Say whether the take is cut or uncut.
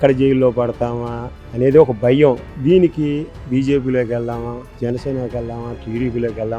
uncut